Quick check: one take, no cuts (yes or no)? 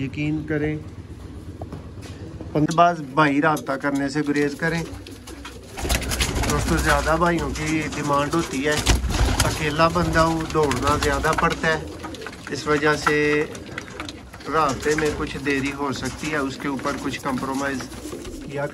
no